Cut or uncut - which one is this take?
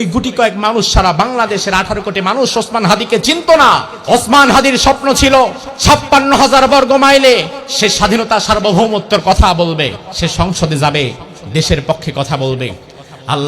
cut